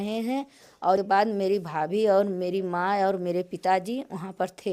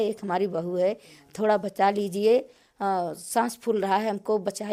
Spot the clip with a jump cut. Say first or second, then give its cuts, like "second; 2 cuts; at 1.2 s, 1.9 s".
first; 1 cut; at 1.0 s